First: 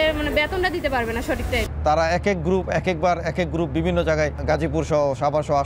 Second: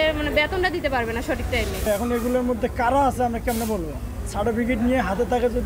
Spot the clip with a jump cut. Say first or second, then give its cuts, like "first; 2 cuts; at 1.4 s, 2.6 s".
first; 2 cuts; at 1.7 s, 4.4 s